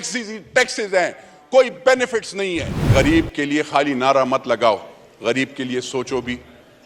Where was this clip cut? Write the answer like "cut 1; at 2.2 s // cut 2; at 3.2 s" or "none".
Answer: cut 1; at 2.9 s